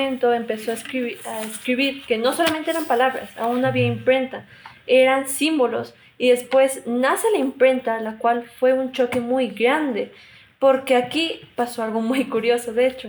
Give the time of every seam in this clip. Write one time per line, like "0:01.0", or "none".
none